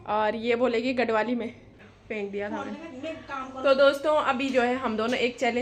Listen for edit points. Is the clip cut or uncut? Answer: cut